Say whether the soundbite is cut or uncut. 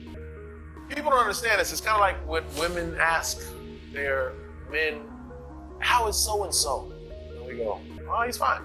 cut